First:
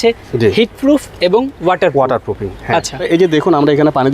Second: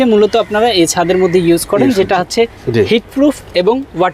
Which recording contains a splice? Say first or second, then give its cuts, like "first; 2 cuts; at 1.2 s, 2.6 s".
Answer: first; 1 cut; at 3.0 s